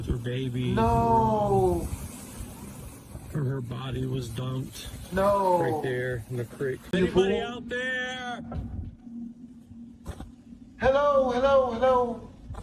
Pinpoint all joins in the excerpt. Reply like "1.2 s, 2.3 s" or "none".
6.9 s